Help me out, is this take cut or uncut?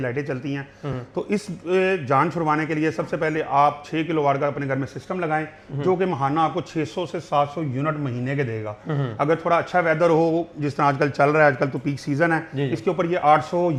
uncut